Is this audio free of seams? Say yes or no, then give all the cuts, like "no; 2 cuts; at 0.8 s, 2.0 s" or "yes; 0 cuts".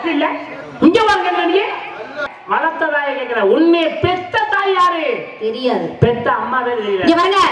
no; 1 cut; at 2.2 s